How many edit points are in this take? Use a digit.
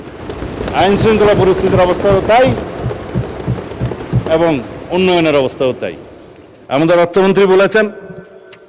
0